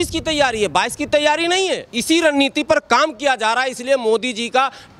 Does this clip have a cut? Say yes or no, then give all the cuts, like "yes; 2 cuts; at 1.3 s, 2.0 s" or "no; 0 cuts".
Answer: yes; 1 cut; at 1.9 s